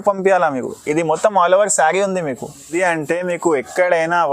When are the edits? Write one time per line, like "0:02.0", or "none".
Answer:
0:02.8